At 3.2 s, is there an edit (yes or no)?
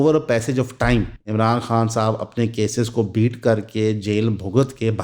no